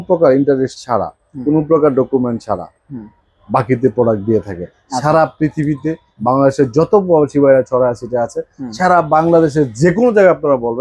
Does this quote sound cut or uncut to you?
uncut